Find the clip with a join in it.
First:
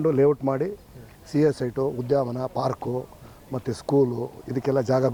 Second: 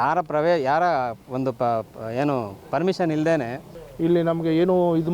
second; 1 cut; at 3.8 s

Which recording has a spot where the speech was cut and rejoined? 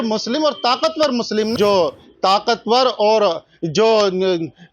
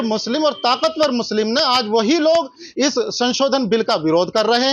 first; 1 cut; at 1.5 s

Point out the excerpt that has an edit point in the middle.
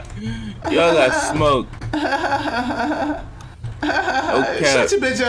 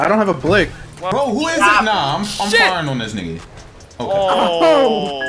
second; 1 cut; at 0.9 s

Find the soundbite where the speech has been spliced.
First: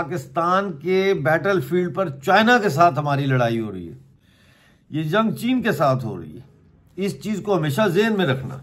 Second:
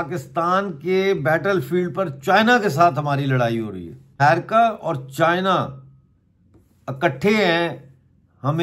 second; 1 cut; at 4.2 s

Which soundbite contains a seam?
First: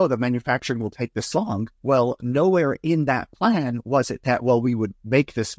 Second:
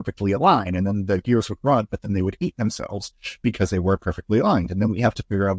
first; 1 cut; at 1.7 s

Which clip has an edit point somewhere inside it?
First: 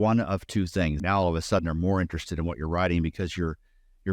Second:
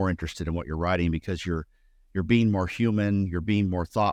first; 1 cut; at 1.0 s

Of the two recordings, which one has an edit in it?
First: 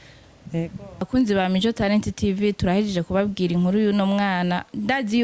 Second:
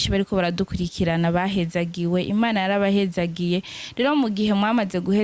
first; 1 cut; at 1.1 s

